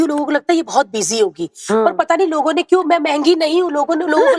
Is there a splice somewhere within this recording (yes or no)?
no